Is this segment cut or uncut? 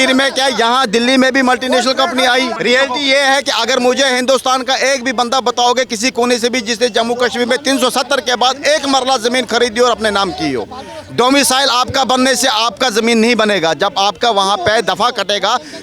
cut